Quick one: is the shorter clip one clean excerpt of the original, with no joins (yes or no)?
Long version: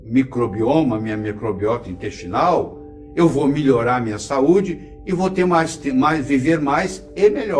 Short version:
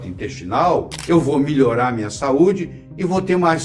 no